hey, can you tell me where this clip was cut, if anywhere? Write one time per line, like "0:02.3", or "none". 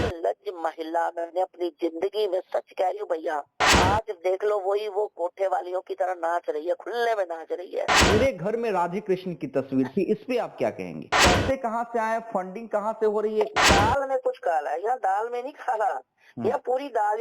0:03.7
0:08.0
0:11.2
0:13.6